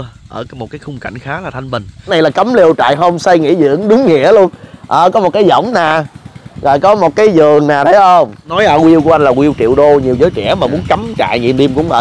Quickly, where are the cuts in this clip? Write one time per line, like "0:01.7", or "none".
0:02.0
0:08.4